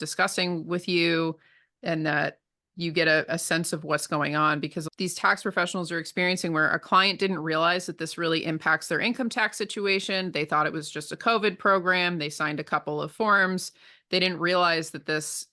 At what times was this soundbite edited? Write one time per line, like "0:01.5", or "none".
0:04.8